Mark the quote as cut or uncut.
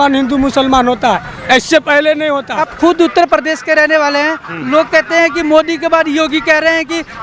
cut